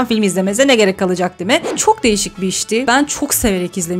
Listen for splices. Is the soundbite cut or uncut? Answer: cut